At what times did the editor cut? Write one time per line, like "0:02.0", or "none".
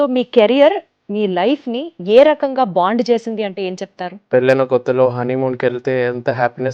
0:04.2